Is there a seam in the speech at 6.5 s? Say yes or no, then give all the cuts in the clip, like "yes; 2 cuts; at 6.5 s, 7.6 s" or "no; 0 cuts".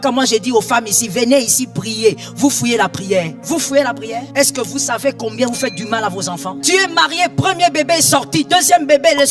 yes; 3 cuts; at 3.4 s, 4.3 s, 6.5 s